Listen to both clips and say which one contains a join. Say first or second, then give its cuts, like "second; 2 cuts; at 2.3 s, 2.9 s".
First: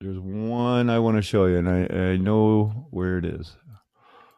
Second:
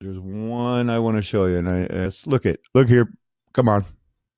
first; 1 cut; at 2.0 s